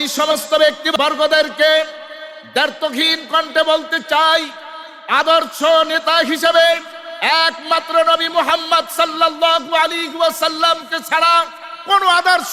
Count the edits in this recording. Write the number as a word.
one